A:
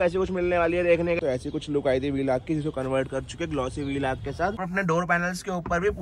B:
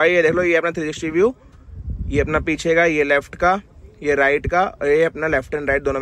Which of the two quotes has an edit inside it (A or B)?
A